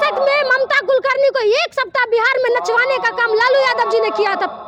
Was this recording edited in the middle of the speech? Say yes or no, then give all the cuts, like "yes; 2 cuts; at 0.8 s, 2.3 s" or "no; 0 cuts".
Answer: no; 0 cuts